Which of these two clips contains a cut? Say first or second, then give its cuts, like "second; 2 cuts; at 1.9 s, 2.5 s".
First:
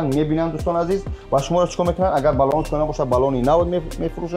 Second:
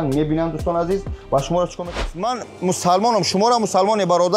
second; 1 cut; at 2.0 s